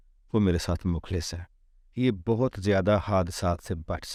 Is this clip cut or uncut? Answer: uncut